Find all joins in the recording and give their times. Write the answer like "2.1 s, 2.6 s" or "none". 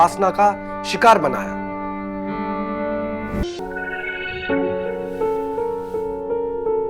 3.4 s